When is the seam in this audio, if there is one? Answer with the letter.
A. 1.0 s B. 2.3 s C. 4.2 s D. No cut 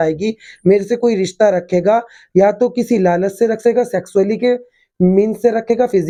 D